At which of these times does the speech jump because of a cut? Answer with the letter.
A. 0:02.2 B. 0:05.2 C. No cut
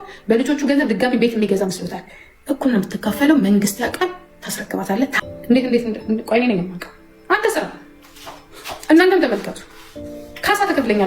B